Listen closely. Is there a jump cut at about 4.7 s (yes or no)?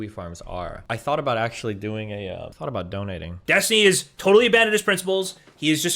no